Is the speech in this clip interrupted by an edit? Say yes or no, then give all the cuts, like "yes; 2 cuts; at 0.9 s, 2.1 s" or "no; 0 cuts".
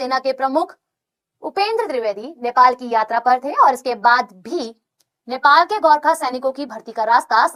no; 0 cuts